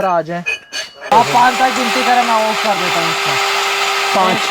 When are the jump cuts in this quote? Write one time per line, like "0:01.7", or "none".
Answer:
0:01.1